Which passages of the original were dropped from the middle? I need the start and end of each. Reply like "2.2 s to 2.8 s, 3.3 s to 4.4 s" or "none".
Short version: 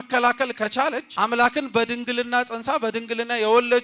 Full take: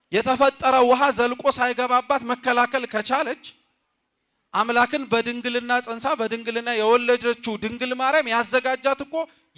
3.4 s to 4.4 s